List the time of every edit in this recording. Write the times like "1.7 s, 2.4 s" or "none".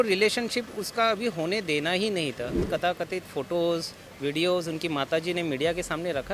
2.6 s